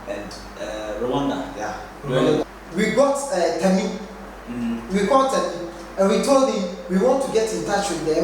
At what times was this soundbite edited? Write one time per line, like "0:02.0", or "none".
0:02.4